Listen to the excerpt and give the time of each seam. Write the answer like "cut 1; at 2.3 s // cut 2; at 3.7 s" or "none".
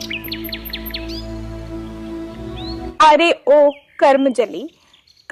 none